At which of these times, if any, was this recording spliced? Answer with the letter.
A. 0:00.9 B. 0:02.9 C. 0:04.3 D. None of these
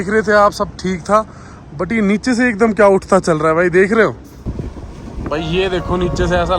C